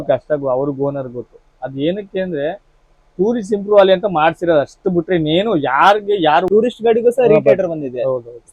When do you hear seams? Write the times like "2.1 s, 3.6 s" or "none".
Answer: 6.5 s